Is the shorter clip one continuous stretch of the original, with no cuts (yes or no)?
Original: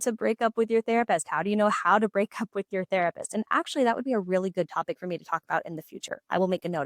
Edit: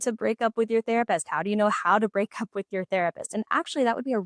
yes